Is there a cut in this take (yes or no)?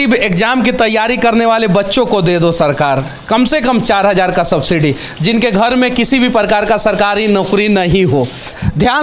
no